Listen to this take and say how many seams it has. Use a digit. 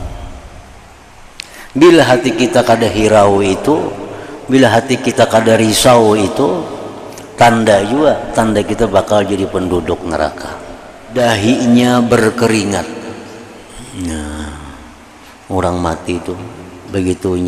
1